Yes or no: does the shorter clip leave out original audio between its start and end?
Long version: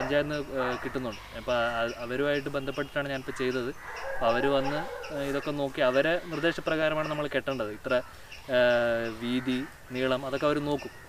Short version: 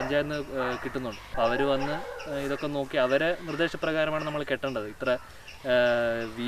yes